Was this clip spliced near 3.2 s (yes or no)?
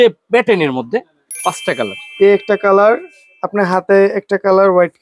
no